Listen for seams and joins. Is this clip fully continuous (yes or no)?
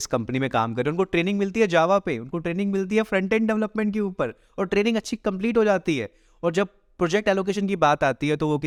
yes